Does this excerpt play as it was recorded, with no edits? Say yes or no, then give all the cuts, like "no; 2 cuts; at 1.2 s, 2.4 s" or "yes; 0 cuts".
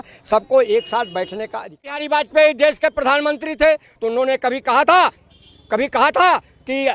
no; 1 cut; at 2.0 s